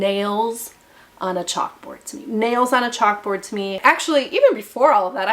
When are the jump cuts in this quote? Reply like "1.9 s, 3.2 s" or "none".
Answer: 3.7 s